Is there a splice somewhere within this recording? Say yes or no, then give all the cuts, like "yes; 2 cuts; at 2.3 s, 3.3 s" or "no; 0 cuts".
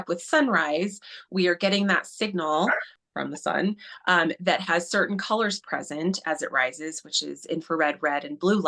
yes; 1 cut; at 2.9 s